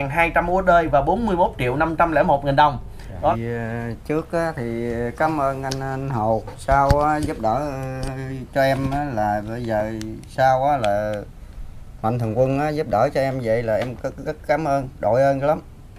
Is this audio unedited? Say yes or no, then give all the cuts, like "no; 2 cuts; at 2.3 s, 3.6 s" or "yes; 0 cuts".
no; 1 cut; at 3.3 s